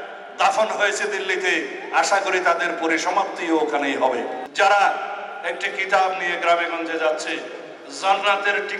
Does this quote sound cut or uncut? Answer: cut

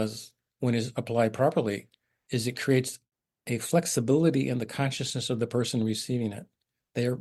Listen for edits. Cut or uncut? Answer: uncut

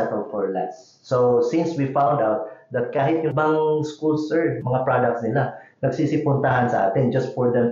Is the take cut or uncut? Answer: cut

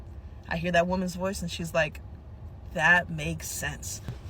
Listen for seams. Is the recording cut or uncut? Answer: uncut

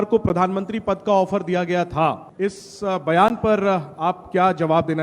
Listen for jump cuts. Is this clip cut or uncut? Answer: cut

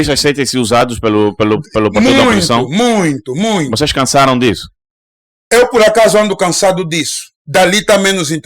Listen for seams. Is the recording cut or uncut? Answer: uncut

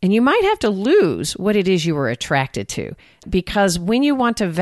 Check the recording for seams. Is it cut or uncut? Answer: cut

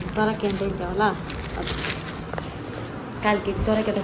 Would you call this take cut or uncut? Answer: uncut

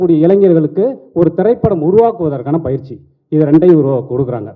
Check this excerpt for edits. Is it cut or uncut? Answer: uncut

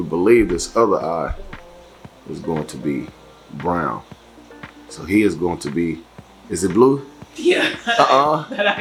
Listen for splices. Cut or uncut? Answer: uncut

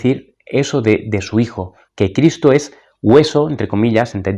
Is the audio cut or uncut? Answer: uncut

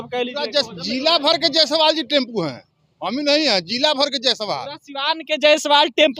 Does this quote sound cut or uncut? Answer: uncut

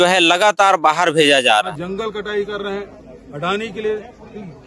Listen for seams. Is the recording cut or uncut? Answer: cut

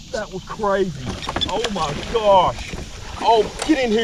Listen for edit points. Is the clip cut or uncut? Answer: uncut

